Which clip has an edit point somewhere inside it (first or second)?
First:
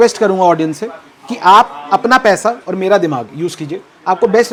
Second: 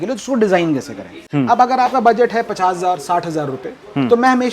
second